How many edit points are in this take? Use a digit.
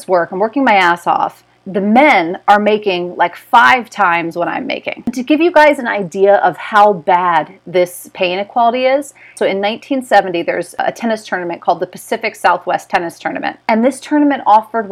5